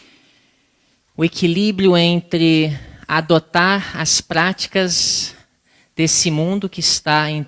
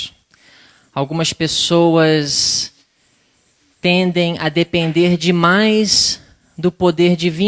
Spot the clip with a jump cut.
first; 1 cut; at 4.0 s

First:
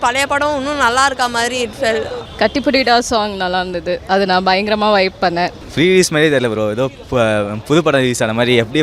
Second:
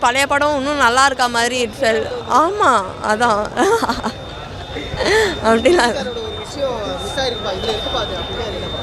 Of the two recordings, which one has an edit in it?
first; 2 cuts; at 2.2 s, 5.6 s

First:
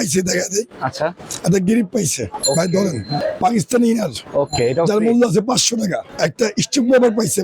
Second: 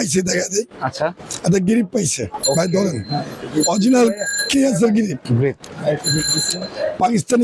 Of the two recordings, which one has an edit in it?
first; 2 cuts; at 3.2 s, 6.1 s

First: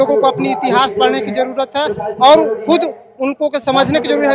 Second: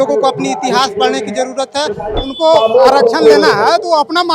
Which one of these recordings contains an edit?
second; 1 cut; at 2.1 s

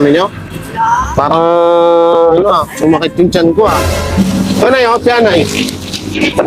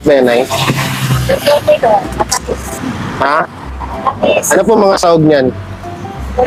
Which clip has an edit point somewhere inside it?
first; 1 cut; at 4.1 s

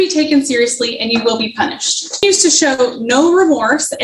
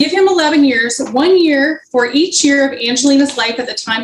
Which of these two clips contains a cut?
first; 1 cut; at 2.2 s

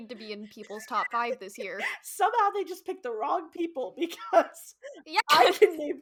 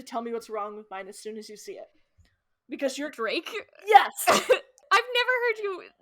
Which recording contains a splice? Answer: second; 1 cut; at 4.8 s

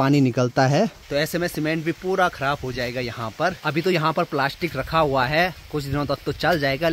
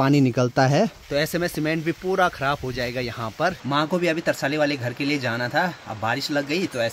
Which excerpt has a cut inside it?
second; 1 cut; at 3.6 s

